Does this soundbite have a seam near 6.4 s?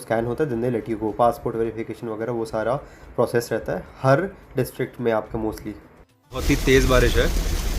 yes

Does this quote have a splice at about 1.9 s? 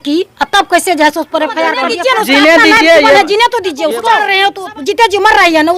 yes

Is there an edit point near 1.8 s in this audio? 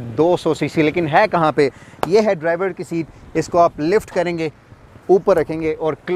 no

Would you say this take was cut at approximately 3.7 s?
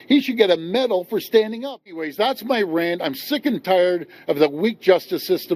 no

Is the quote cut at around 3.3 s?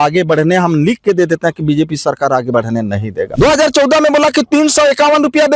yes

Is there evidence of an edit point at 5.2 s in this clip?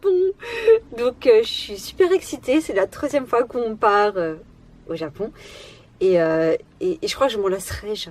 no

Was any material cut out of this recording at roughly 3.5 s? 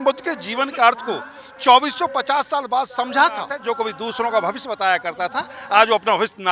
yes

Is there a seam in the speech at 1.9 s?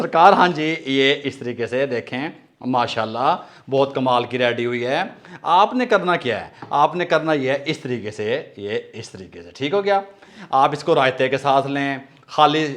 no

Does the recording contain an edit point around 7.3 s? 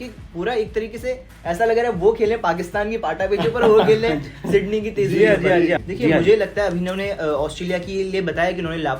no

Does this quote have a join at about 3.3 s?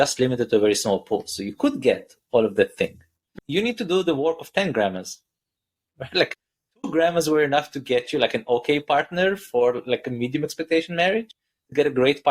yes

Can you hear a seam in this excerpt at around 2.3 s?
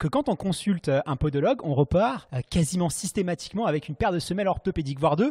yes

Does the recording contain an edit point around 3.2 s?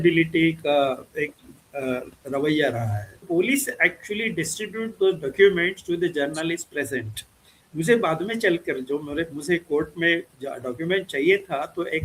yes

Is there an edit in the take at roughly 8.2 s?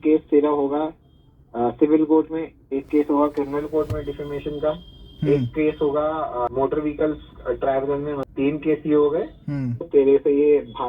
yes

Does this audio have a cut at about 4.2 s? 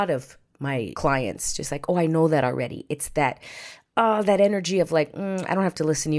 no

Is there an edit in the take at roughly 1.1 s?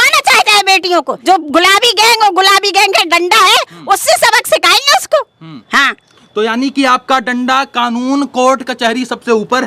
yes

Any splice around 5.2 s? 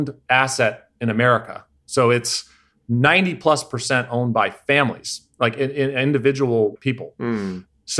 no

